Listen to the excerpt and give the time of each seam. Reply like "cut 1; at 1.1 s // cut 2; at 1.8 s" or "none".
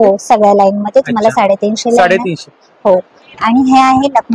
none